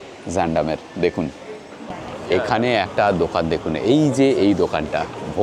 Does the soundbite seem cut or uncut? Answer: cut